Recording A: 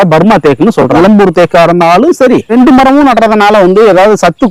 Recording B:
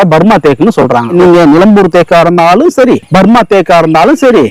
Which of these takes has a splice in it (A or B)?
A